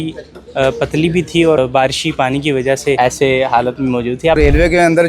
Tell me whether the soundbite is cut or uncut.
cut